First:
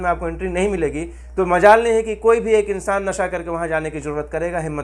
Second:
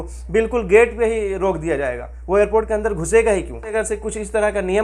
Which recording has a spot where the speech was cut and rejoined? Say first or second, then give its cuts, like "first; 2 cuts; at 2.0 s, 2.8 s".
second; 1 cut; at 3.7 s